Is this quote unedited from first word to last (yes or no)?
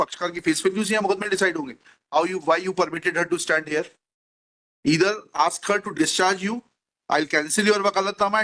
yes